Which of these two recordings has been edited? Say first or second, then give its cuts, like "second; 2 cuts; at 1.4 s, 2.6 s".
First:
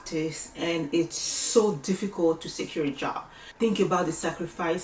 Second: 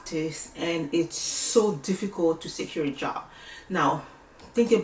first; 1 cut; at 3.4 s